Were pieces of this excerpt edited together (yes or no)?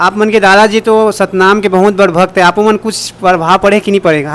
no